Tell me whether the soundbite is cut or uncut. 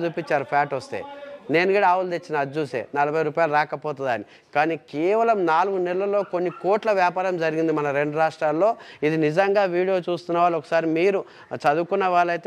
uncut